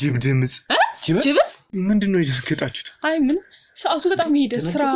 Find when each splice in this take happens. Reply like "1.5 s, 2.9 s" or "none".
1.6 s